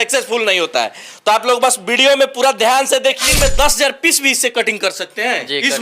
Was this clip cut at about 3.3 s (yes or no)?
yes